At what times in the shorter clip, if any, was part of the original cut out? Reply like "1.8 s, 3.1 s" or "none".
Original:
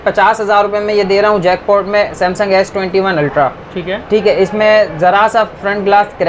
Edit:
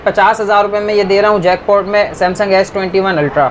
none